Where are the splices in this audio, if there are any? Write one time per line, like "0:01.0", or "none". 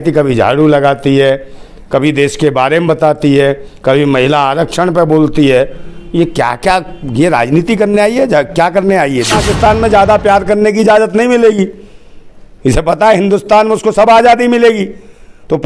0:09.4